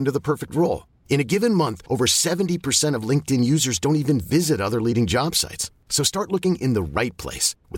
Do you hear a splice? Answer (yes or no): no